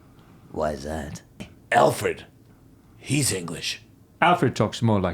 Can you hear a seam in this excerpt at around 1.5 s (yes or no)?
yes